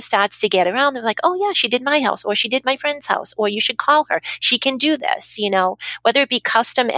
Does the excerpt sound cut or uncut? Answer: uncut